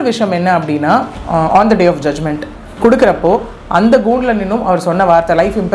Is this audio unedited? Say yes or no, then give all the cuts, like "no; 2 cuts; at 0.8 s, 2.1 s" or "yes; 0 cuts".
yes; 0 cuts